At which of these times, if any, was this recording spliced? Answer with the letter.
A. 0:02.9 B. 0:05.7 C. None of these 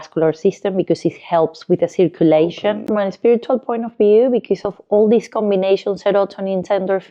A